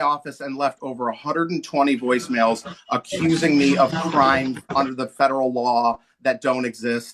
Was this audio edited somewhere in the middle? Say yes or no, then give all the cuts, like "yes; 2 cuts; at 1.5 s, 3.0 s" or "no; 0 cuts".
no; 0 cuts